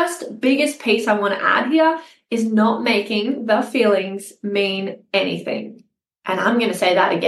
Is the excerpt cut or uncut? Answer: uncut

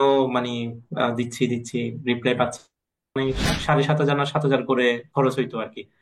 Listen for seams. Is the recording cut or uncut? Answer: cut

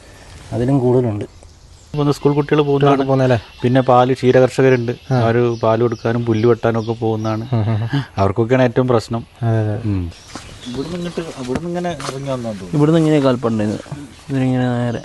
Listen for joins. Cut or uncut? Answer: cut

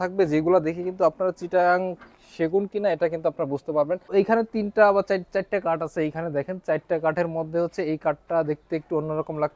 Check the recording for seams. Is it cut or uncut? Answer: cut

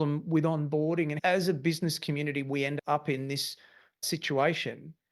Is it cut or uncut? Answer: cut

